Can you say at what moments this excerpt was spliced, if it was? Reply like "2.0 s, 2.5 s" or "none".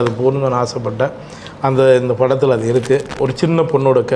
3.1 s

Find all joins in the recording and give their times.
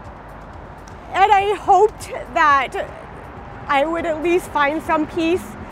1.0 s

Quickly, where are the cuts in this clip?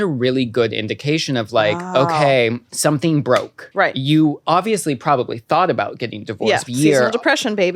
2.7 s, 3.6 s, 6.6 s

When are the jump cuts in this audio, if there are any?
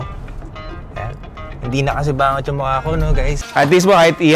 3.3 s

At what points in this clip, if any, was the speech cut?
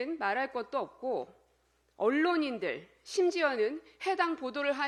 none

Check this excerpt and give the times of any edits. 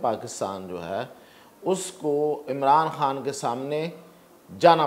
none

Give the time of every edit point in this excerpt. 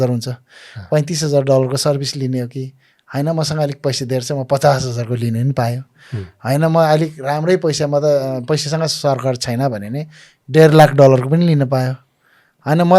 none

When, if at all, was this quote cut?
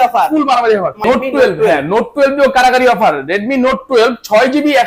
0.9 s

